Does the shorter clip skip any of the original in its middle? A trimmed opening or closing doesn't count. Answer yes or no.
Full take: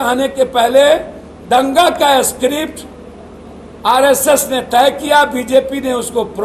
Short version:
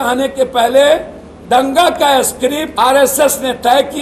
yes